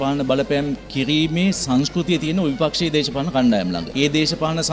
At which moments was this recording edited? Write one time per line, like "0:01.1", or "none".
none